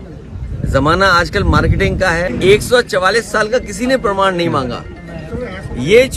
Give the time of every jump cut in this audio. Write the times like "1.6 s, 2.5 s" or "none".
2.3 s